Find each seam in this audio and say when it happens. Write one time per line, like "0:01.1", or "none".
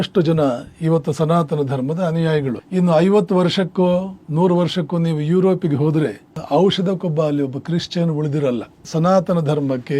0:02.6
0:04.2
0:08.8

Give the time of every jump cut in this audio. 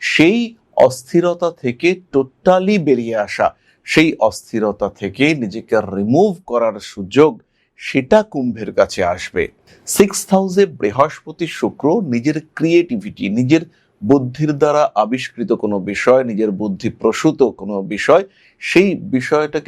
0:09.6

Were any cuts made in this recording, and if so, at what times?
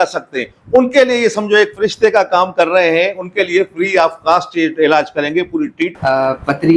0:05.9

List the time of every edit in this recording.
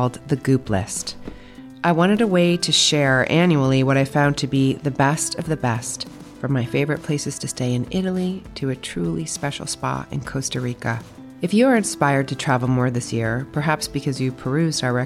none

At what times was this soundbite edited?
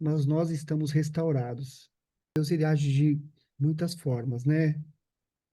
0:02.4

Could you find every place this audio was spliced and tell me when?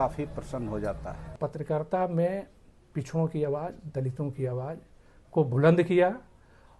0:01.4

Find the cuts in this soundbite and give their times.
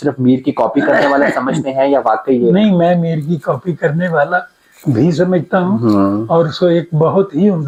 none

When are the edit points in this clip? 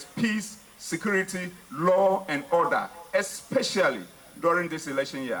none

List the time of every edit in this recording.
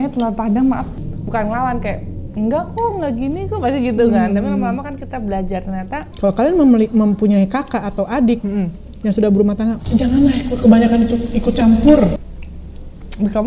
0:01.0
0:06.1

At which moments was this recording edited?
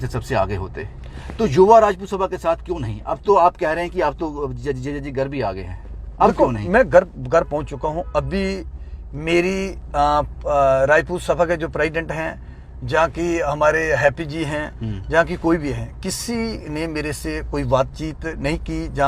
none

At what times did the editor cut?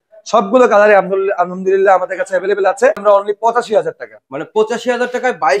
0:03.0

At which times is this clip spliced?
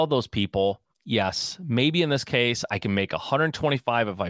0:00.9

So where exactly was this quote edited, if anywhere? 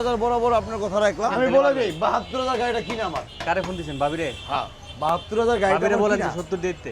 0:01.2

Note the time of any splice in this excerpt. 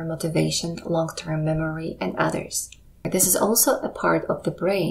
0:03.0

